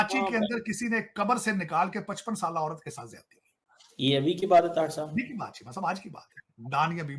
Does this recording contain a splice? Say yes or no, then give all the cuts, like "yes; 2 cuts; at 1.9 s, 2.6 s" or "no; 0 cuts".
no; 0 cuts